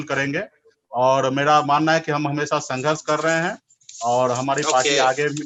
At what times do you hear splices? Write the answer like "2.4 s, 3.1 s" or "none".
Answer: none